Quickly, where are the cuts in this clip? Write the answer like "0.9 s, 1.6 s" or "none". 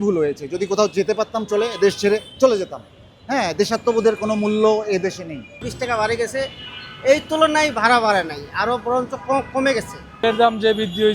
5.6 s, 10.1 s